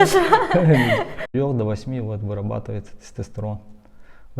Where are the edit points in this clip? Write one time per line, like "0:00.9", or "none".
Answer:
0:01.3